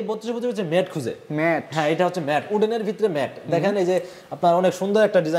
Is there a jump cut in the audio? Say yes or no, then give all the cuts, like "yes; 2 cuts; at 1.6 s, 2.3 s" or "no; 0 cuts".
no; 0 cuts